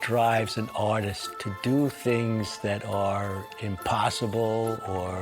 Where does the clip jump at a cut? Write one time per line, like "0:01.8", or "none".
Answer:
0:01.2